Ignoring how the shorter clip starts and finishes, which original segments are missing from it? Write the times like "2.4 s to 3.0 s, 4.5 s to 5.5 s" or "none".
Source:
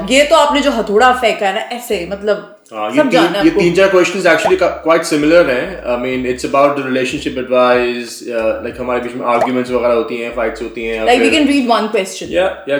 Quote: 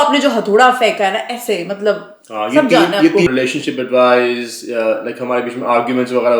3.7 s to 6.9 s